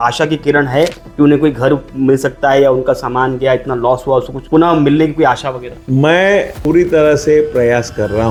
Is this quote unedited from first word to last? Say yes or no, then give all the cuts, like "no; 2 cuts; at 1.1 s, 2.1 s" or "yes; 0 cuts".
yes; 0 cuts